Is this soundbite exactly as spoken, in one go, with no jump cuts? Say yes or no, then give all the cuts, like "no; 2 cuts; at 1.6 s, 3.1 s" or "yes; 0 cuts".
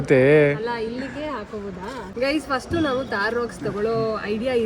no; 1 cut; at 2.1 s